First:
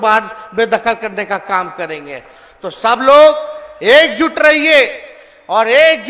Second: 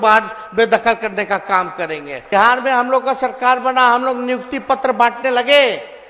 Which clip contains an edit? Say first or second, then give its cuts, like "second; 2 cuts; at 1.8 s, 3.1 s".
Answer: second; 1 cut; at 2.3 s